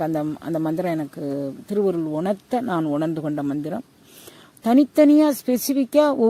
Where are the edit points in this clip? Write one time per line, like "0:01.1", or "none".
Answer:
none